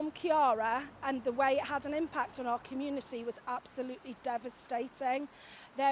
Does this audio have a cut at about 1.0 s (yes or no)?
no